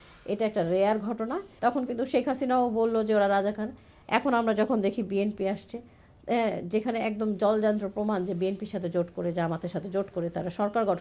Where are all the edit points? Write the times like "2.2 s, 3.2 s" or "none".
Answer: 1.4 s